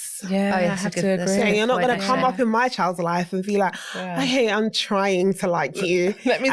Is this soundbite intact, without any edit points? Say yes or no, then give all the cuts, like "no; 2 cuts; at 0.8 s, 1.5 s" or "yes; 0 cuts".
yes; 0 cuts